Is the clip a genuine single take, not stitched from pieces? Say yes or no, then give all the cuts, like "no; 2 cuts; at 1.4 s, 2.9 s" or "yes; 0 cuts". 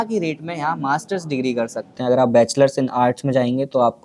no; 1 cut; at 1.9 s